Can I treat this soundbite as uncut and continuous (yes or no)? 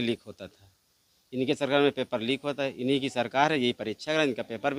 yes